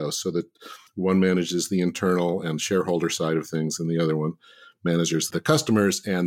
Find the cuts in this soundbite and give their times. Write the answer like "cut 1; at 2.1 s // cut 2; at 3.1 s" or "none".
cut 1; at 5.3 s

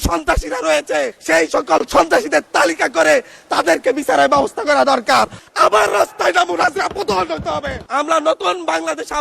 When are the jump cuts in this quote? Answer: cut 1; at 1.2 s // cut 2; at 5.4 s // cut 3; at 7.8 s

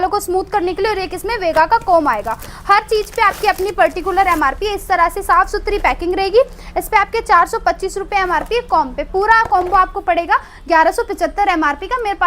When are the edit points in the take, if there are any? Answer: none

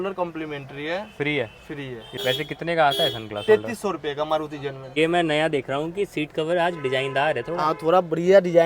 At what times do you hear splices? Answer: cut 1; at 2.2 s // cut 2; at 4.8 s

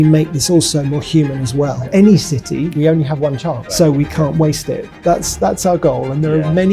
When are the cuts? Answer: cut 1; at 1.8 s // cut 2; at 2.7 s // cut 3; at 3.6 s // cut 4; at 4.9 s

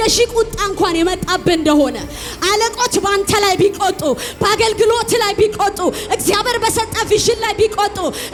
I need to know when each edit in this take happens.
none

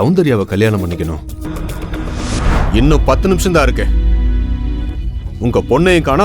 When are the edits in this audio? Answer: cut 1; at 2.6 s

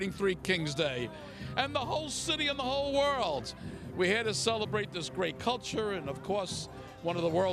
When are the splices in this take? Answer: none

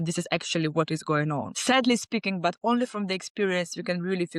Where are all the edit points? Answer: cut 1; at 1.5 s

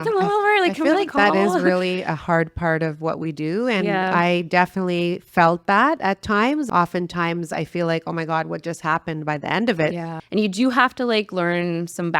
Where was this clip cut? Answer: cut 1; at 6.7 s // cut 2; at 10.2 s

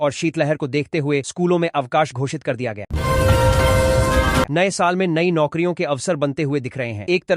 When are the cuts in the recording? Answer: cut 1; at 2.9 s // cut 2; at 4.5 s

